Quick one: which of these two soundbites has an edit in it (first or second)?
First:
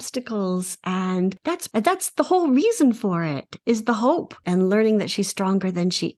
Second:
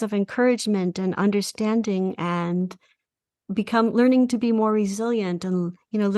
first